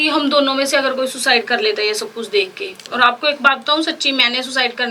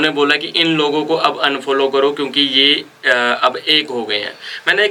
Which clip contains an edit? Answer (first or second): first